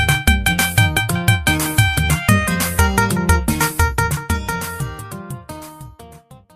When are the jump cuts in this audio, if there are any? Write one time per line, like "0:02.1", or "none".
none